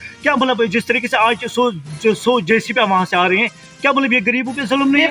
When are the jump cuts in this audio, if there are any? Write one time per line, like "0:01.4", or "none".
none